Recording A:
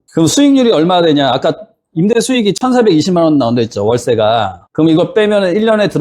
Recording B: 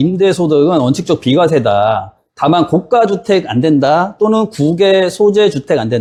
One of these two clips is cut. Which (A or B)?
A